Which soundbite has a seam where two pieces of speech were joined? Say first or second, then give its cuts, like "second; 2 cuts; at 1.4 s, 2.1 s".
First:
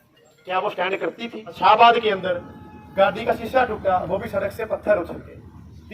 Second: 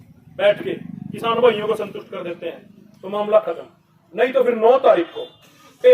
first; 1 cut; at 1.6 s